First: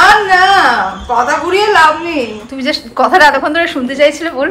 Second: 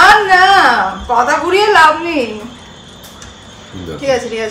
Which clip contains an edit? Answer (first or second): first